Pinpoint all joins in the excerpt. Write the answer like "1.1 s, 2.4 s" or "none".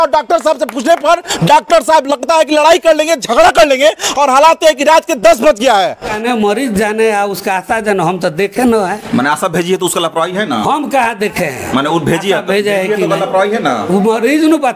6.1 s